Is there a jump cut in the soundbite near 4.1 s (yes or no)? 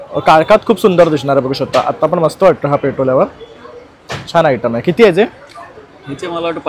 no